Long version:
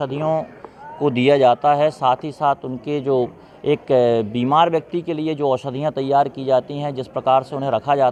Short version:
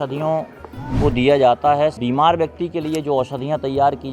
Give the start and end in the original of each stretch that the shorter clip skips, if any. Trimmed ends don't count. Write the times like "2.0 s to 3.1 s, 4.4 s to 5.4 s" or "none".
2.0 s to 4.3 s

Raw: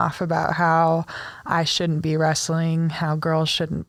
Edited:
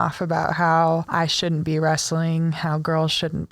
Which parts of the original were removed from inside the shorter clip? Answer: 1.1 s to 1.4 s

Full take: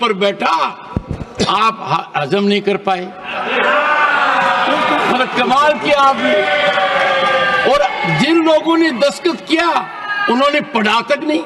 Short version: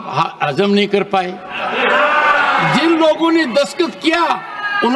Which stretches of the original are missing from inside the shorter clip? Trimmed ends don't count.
4.4 s to 8.1 s

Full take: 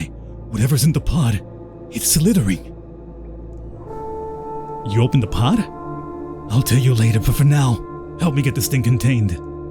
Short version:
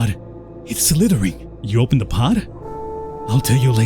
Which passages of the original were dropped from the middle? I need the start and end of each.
2.8 s to 4.8 s

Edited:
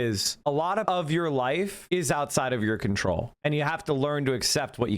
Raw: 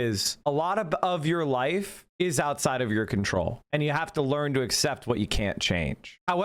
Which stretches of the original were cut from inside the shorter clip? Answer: 0.9 s to 1.0 s, 1.9 s to 2.1 s

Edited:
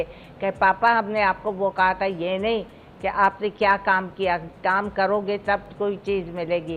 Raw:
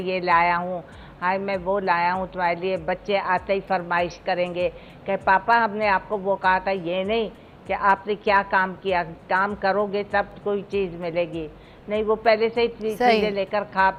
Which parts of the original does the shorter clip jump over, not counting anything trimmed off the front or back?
none

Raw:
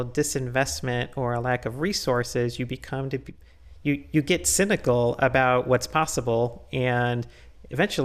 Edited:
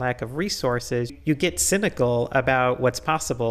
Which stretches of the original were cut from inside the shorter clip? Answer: 2.6 s to 4.0 s

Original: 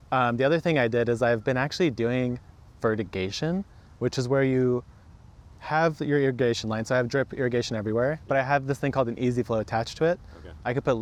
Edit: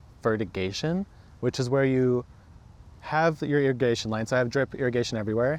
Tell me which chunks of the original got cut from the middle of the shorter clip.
none

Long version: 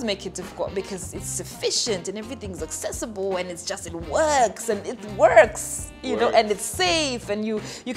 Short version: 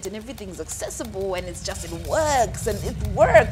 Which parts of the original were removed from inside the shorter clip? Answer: none

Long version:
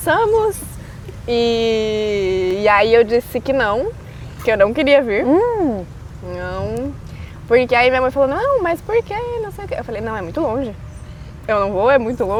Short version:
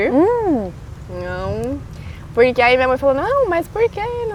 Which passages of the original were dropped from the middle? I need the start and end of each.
none

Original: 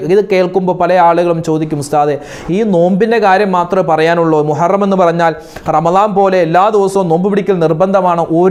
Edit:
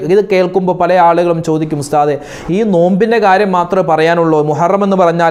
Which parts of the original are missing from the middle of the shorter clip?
none

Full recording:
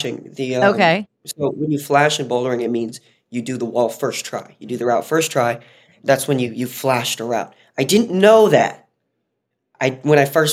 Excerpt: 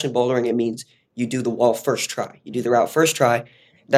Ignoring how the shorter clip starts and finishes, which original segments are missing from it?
none

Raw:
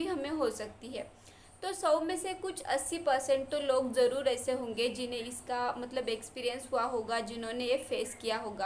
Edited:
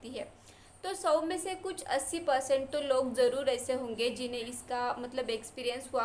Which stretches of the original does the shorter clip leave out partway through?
none

